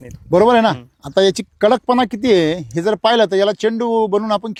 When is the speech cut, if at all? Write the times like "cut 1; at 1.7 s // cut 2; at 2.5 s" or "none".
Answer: none